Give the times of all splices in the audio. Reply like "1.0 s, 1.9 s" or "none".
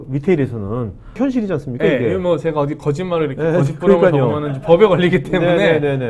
1.2 s